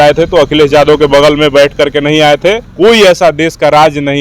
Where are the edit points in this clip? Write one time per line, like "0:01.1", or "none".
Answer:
0:02.7